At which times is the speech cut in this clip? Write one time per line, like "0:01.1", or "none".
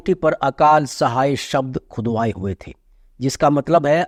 none